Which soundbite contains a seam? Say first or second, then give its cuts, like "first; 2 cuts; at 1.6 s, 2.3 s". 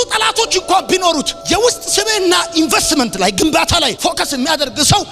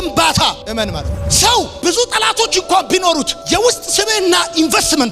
second; 1 cut; at 1.1 s